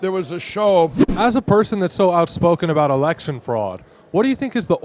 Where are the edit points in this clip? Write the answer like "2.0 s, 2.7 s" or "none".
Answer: 1.0 s